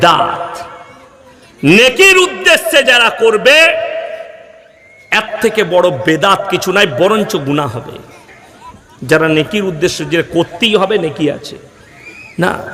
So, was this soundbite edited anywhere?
no; 0 cuts

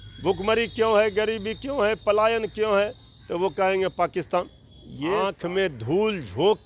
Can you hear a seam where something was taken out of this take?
yes; 1 cut; at 5.2 s

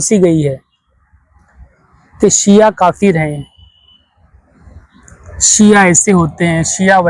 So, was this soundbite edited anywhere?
no; 0 cuts

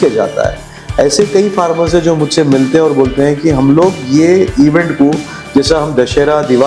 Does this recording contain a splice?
no; 0 cuts

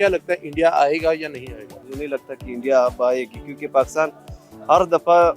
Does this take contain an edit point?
yes; 1 cut; at 1.8 s

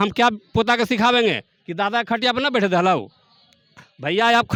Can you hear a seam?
no; 0 cuts

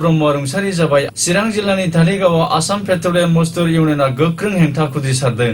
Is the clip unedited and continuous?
no; 1 cut; at 1.1 s

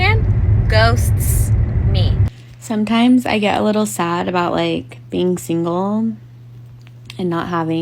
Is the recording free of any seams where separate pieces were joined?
no; 1 cut; at 2.3 s

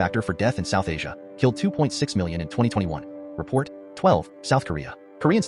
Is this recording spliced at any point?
yes; 1 cut; at 3.8 s

